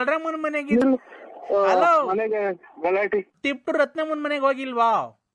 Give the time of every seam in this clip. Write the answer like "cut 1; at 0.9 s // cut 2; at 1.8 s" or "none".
cut 1; at 3.3 s